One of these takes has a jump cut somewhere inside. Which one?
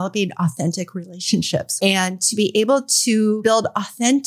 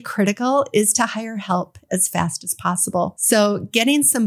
first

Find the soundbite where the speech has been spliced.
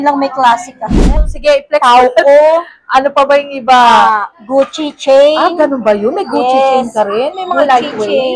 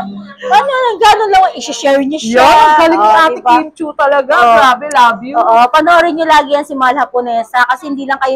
first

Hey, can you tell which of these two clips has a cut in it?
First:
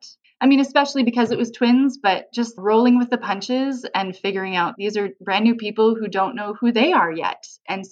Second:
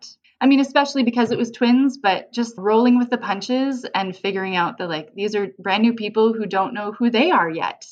first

